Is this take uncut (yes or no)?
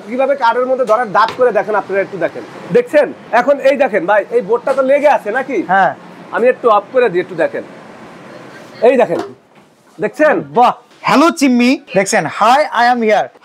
no